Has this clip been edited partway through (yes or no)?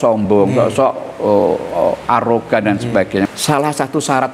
yes